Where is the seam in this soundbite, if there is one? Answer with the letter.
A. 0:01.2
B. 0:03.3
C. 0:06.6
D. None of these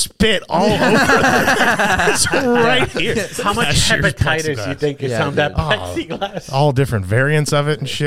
B